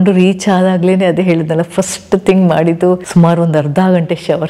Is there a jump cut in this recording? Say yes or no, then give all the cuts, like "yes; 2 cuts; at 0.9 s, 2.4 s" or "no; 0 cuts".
no; 0 cuts